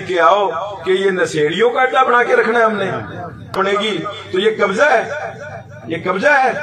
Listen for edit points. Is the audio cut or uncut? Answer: cut